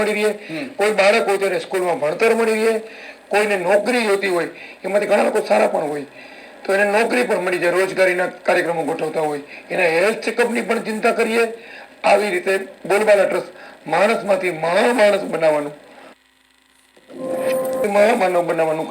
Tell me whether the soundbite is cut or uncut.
uncut